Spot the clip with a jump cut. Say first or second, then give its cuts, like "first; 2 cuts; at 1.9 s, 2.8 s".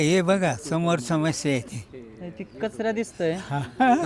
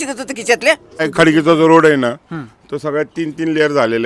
second; 1 cut; at 1.0 s